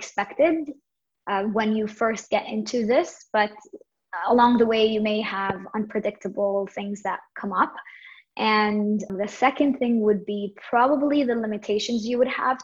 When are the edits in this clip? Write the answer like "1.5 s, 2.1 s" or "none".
9.1 s